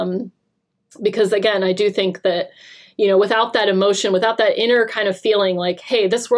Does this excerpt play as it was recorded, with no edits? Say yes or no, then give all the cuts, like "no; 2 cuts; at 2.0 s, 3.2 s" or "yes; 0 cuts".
yes; 0 cuts